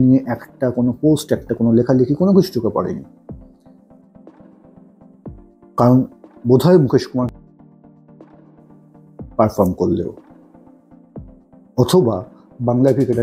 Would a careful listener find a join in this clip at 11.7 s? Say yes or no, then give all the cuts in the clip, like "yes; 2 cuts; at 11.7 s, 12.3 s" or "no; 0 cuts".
yes; 4 cuts; at 3.1 s, 5.5 s, 10.1 s, 11.7 s